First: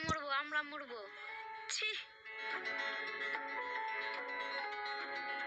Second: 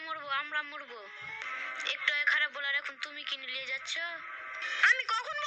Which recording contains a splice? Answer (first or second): second